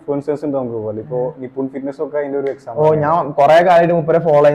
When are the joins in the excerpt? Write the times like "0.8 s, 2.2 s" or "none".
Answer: none